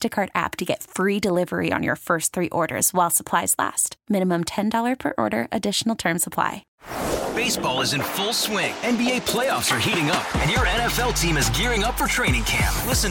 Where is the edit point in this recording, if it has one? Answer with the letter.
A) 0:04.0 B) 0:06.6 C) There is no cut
B